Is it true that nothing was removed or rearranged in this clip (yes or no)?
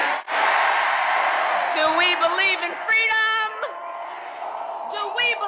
yes